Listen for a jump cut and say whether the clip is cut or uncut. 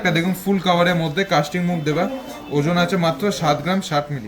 uncut